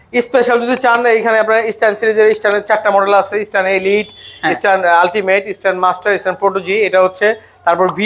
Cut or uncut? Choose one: uncut